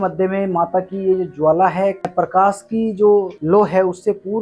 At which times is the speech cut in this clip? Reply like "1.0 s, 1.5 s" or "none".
2.0 s